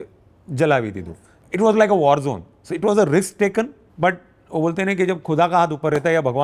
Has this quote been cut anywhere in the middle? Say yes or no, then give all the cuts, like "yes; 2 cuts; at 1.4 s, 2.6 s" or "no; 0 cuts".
yes; 2 cuts; at 1.3 s, 3.8 s